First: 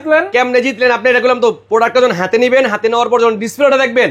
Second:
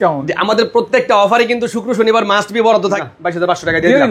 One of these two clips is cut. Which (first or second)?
second